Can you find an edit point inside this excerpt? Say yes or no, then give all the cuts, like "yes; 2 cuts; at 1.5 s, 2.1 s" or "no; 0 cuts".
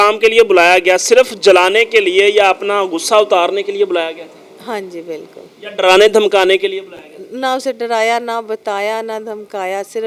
no; 0 cuts